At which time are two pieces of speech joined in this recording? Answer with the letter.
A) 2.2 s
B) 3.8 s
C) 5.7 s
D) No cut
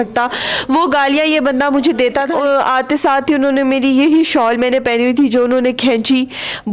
A